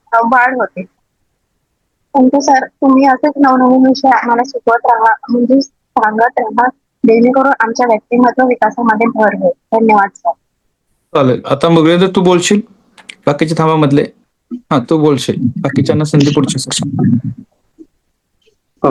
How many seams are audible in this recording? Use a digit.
0